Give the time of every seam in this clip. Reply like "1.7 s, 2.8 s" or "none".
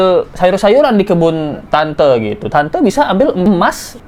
none